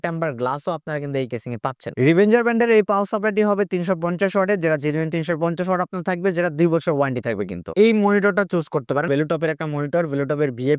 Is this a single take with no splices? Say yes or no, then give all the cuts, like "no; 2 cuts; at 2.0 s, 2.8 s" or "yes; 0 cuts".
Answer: no; 3 cuts; at 1.8 s, 7.7 s, 9.1 s